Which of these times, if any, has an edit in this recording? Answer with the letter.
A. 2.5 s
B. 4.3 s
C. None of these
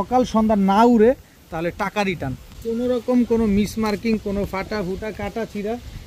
A